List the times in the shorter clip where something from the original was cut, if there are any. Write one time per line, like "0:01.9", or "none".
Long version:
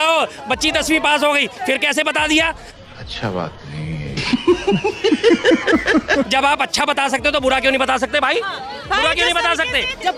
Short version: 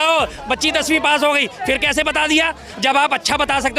0:02.8